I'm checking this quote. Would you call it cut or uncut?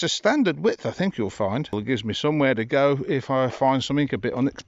cut